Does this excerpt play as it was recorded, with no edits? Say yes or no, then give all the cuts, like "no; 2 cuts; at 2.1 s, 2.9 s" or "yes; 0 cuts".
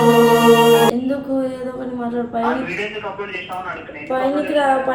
no; 1 cut; at 0.9 s